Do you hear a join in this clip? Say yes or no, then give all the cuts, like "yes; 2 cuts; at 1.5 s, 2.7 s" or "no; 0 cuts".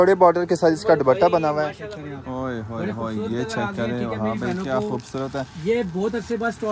yes; 1 cut; at 1.9 s